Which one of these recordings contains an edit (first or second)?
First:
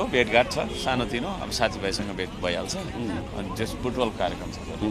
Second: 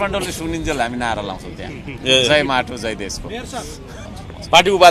second